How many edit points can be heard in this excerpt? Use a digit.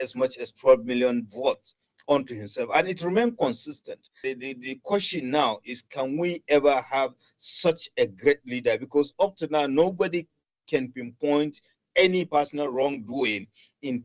1